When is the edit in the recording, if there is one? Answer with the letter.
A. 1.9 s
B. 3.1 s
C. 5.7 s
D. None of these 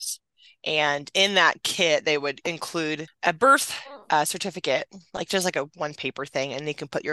B